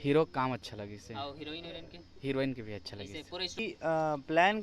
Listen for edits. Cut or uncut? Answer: cut